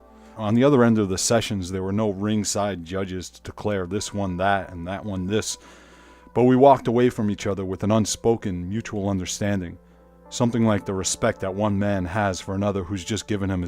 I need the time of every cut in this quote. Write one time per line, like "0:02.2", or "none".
0:10.7